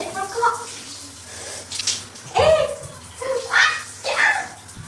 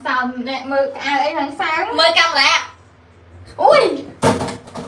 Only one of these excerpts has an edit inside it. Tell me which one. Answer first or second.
first